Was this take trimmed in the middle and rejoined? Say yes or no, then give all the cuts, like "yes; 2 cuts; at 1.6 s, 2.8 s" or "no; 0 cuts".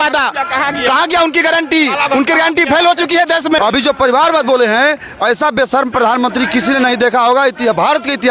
yes; 1 cut; at 3.6 s